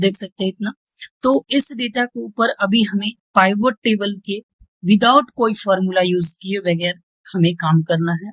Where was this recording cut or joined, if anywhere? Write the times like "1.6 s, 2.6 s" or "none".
none